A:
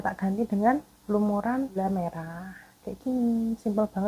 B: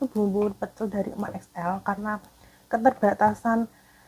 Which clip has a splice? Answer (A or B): A